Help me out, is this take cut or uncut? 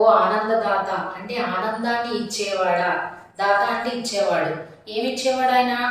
uncut